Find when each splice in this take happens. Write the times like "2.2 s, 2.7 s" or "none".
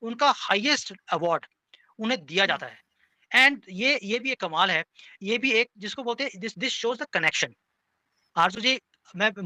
none